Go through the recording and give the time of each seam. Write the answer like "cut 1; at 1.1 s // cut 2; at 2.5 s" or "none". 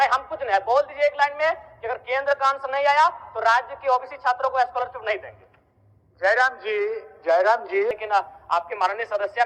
cut 1; at 8.0 s